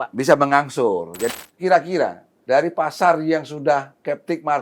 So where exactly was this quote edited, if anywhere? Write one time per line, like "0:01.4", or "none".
0:01.3
0:02.3